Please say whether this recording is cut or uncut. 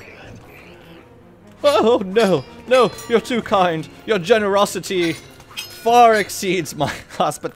uncut